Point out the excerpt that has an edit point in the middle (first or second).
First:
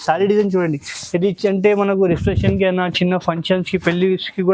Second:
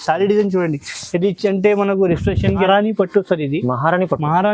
second